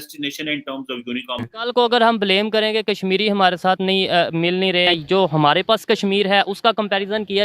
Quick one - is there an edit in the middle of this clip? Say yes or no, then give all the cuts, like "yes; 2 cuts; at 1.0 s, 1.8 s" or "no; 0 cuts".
yes; 2 cuts; at 1.5 s, 4.9 s